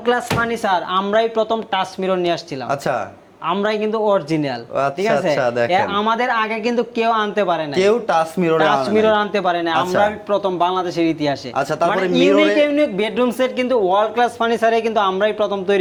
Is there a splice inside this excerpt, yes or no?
no